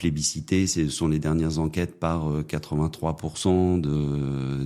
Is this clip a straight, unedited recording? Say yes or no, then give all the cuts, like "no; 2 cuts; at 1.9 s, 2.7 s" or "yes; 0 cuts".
yes; 0 cuts